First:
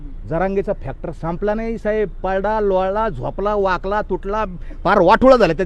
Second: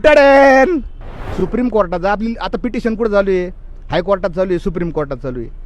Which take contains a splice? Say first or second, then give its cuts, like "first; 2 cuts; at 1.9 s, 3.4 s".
second; 1 cut; at 1.2 s